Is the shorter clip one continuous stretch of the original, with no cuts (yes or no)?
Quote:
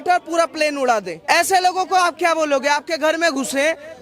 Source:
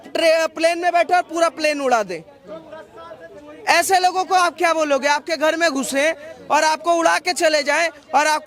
no